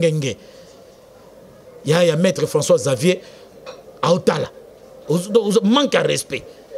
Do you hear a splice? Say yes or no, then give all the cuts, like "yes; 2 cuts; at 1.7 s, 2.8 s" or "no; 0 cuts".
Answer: no; 0 cuts